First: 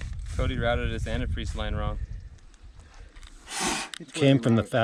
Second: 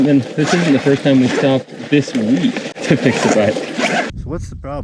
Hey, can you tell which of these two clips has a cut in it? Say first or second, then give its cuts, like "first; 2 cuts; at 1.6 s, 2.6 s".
second; 2 cuts; at 2.7 s, 4.1 s